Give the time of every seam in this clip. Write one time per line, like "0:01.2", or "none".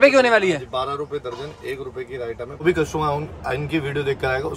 0:02.6